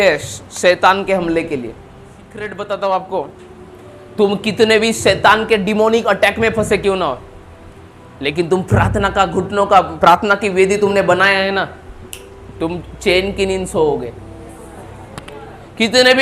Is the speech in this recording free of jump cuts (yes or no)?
no